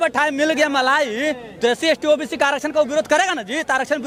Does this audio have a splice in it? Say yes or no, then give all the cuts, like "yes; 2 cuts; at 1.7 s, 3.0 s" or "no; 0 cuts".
no; 0 cuts